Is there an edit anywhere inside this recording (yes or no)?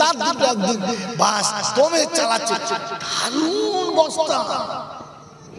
no